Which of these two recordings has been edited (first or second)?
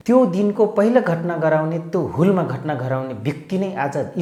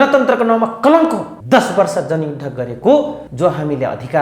second